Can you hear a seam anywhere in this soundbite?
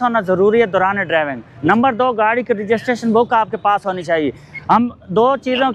no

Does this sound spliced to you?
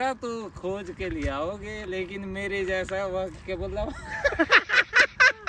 no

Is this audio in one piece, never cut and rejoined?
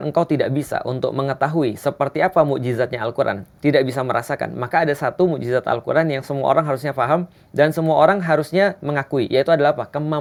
yes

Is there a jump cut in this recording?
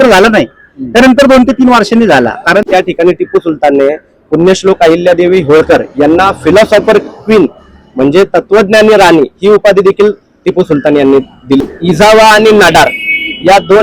yes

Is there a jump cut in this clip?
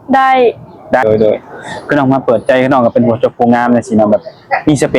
yes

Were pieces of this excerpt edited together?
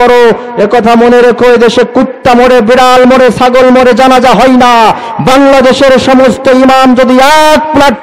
no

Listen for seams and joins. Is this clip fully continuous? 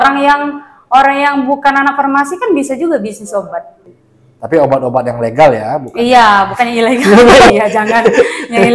no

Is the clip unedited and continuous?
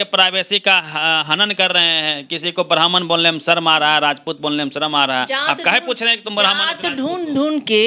yes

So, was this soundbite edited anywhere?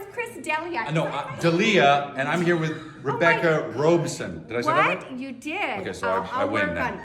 no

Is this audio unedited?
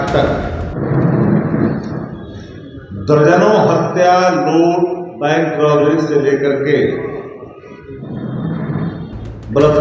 yes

